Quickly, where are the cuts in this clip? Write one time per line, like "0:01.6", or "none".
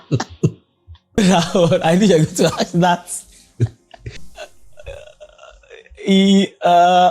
0:01.2
0:04.2